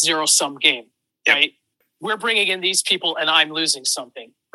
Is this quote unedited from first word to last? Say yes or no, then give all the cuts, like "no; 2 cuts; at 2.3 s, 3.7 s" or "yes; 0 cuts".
no; 1 cut; at 1.8 s